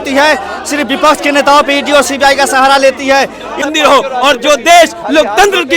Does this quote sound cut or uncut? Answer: cut